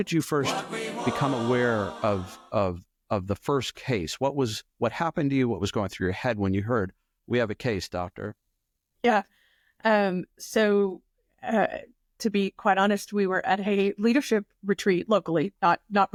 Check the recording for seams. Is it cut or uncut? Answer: uncut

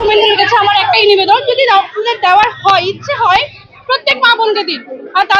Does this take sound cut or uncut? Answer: uncut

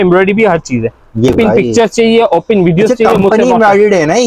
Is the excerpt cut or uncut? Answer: cut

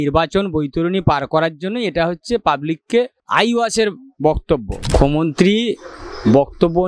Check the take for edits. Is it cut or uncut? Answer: cut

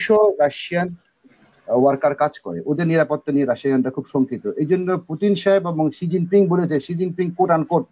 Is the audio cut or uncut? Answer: uncut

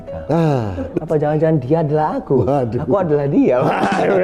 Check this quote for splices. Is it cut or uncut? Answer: cut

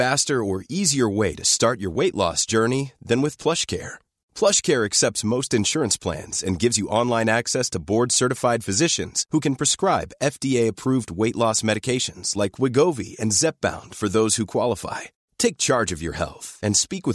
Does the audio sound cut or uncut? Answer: uncut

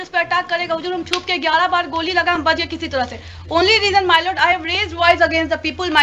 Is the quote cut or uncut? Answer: uncut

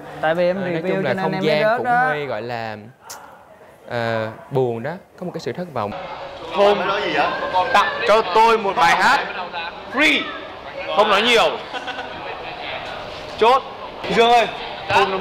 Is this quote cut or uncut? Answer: cut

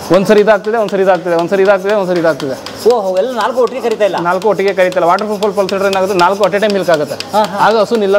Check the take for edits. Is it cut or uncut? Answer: uncut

